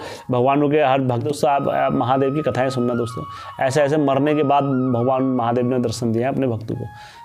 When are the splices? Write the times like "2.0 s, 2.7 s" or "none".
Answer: 1.3 s